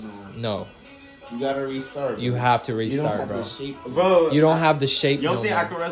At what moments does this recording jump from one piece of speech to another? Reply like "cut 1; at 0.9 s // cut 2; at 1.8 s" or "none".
none